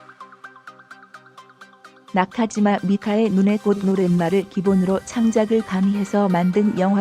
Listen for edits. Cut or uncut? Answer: cut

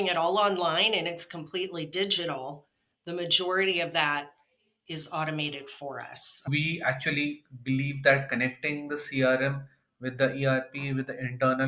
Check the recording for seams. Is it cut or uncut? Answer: cut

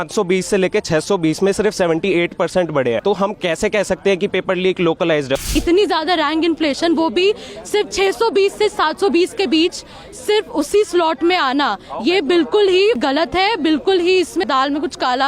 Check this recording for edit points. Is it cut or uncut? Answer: cut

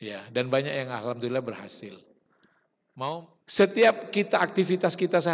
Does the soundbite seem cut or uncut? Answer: cut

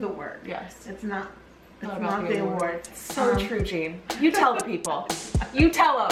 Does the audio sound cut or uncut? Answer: uncut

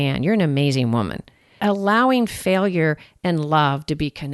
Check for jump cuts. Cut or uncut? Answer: cut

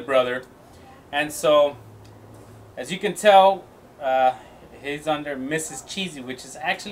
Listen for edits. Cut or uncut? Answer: cut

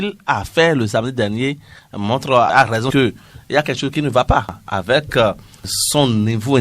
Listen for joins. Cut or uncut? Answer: cut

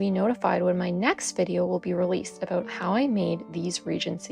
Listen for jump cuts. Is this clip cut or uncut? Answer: cut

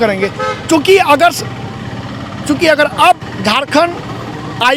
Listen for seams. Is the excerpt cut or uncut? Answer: uncut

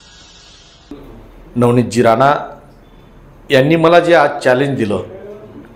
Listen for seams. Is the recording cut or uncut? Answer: cut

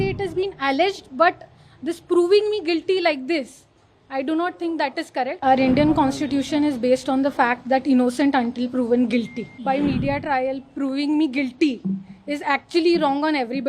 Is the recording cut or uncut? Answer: cut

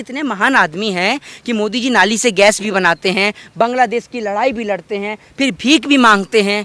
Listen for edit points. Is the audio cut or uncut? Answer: uncut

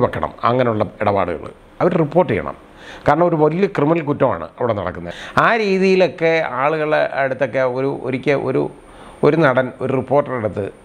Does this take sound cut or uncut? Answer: cut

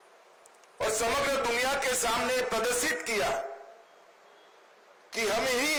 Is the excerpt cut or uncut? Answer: uncut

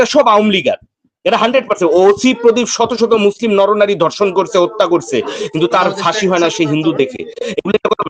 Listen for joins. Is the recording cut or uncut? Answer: uncut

